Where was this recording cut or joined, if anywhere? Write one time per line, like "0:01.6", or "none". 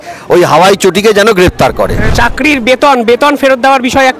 0:02.1